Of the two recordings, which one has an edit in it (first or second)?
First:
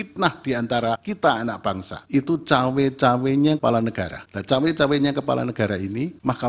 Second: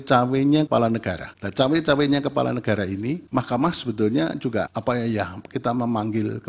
first